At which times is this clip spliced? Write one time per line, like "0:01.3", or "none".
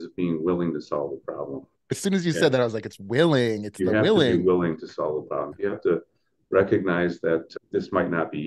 0:02.0
0:05.5
0:07.5